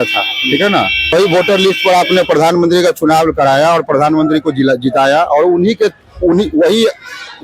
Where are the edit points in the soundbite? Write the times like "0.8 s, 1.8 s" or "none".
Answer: 1.1 s